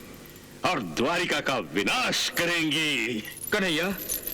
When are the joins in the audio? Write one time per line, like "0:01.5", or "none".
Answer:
0:03.3